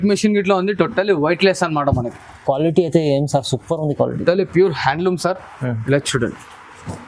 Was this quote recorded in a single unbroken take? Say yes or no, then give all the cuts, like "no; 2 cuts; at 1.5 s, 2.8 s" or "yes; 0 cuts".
yes; 0 cuts